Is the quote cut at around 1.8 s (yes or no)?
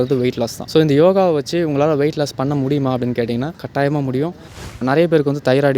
no